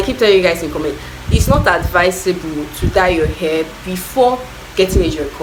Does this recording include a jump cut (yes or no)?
no